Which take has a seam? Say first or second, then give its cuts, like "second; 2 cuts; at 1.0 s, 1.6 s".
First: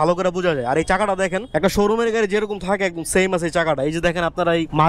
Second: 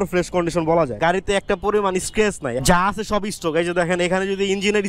second; 2 cuts; at 0.9 s, 2.6 s